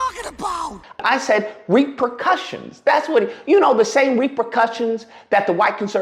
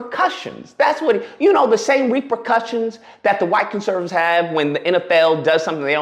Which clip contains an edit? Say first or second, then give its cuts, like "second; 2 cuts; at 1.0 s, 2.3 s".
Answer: first; 1 cut; at 1.0 s